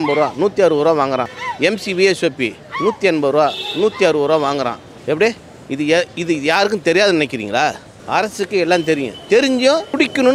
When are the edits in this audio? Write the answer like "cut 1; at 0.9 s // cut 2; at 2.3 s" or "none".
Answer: none